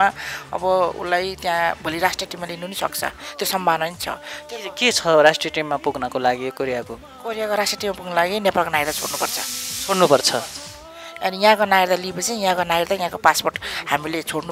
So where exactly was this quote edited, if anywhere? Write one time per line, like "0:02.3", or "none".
none